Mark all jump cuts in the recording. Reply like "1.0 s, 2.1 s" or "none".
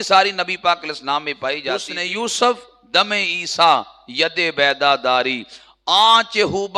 1.9 s